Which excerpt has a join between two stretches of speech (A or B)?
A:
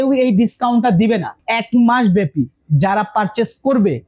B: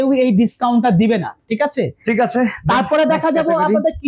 A